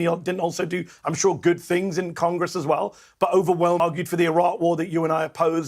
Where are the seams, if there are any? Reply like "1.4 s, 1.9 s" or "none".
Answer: 3.8 s